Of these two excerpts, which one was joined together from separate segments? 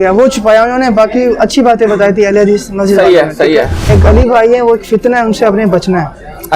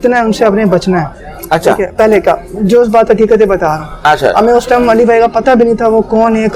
first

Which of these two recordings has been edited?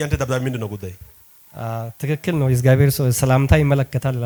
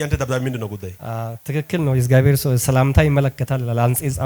second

